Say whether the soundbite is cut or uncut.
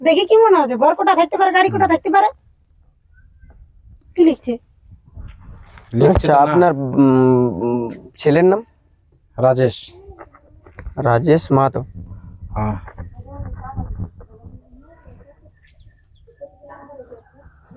uncut